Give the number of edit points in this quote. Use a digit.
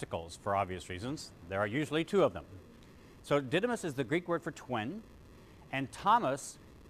1